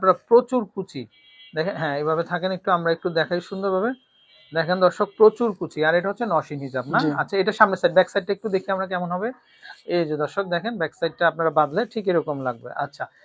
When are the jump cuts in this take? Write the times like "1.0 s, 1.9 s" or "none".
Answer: none